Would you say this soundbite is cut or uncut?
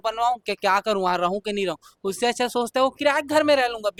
uncut